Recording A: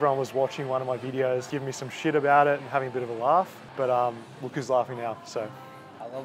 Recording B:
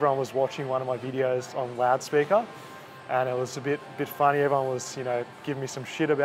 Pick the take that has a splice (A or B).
A